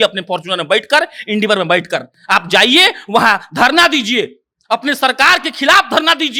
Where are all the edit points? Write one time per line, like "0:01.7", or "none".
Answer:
none